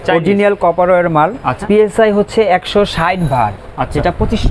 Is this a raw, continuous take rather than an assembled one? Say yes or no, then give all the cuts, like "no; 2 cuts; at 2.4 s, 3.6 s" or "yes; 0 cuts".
yes; 0 cuts